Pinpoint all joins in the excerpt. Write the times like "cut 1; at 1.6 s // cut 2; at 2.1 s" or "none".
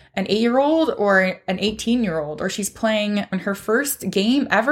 cut 1; at 3.3 s